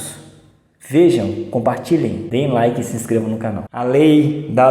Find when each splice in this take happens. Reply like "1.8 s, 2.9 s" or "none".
3.6 s